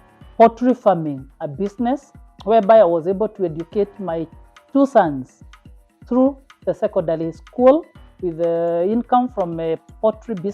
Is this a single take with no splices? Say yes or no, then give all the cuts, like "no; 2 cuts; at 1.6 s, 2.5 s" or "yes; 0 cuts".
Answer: yes; 0 cuts